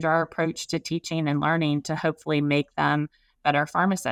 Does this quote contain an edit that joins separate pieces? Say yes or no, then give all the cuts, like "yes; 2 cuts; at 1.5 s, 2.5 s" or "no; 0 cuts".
no; 0 cuts